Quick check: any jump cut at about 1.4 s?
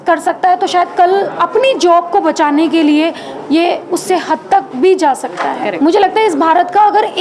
no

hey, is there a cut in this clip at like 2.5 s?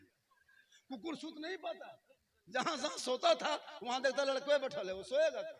no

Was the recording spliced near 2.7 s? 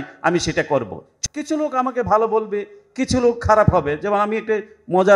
no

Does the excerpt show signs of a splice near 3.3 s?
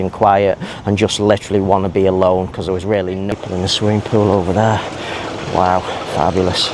yes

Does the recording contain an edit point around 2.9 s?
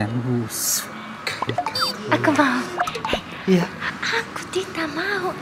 yes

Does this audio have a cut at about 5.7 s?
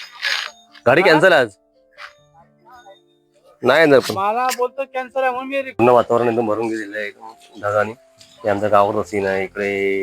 yes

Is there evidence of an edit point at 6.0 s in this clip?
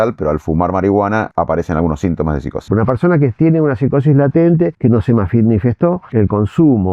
yes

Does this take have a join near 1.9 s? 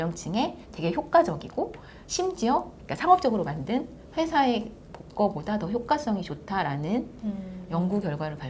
no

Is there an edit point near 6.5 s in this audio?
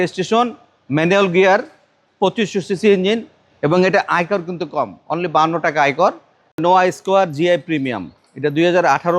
yes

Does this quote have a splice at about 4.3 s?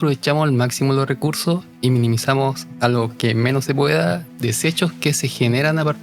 yes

